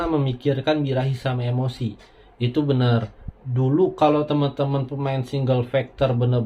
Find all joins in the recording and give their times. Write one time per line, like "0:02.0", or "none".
0:03.2